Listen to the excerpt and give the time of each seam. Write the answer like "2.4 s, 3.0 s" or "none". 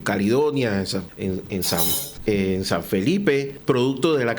1.1 s, 2.1 s, 3.5 s

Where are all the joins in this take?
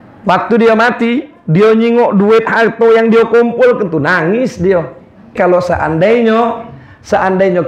5.4 s

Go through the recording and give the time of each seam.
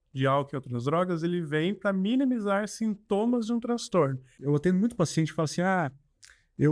4.3 s

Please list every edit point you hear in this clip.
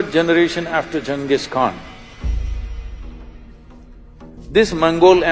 4.4 s

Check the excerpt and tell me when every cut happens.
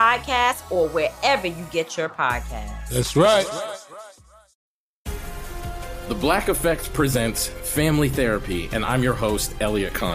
4.5 s

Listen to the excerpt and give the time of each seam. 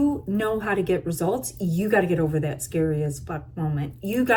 none

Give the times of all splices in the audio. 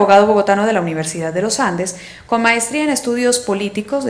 2.7 s

